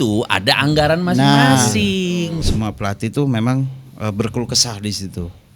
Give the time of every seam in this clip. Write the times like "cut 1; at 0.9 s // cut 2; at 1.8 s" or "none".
cut 1; at 2.4 s